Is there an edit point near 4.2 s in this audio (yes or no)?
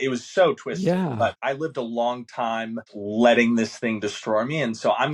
no